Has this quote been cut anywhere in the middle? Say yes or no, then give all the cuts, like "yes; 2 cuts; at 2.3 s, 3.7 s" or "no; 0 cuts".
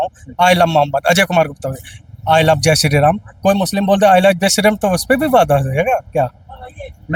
no; 0 cuts